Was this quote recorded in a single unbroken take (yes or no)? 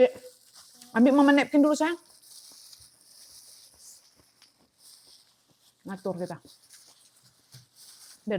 yes